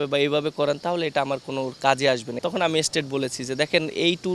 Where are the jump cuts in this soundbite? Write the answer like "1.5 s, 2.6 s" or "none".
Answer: 2.3 s